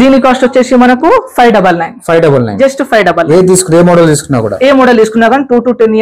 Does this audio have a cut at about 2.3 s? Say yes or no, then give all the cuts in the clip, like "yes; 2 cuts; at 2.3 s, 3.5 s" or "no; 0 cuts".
no; 0 cuts